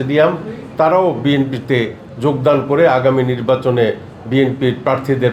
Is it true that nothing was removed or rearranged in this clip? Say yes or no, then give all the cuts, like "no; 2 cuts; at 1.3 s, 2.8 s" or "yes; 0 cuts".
yes; 0 cuts